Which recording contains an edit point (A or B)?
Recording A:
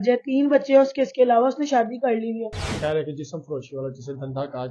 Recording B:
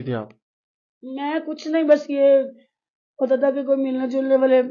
A